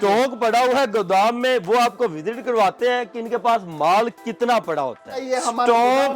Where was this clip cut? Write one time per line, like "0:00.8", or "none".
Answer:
0:05.2